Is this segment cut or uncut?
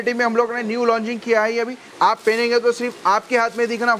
cut